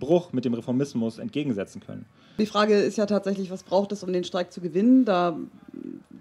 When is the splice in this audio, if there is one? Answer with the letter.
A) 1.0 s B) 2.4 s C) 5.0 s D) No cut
B